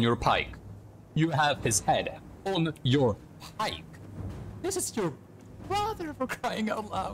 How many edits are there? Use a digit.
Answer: 0